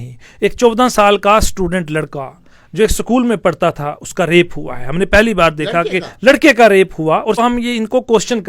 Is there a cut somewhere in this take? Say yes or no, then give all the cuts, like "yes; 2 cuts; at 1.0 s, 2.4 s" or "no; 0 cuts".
yes; 1 cut; at 7.4 s